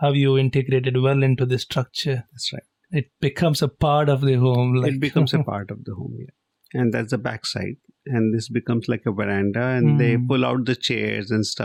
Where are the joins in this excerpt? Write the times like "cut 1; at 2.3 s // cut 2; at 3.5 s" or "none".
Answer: none